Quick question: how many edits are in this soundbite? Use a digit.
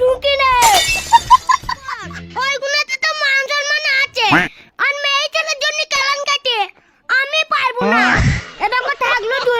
1